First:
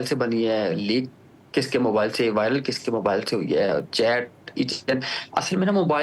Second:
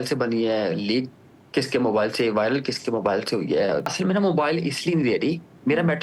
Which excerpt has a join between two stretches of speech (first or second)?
second